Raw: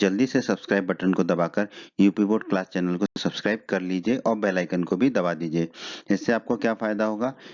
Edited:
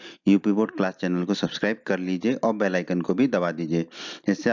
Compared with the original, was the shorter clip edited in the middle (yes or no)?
yes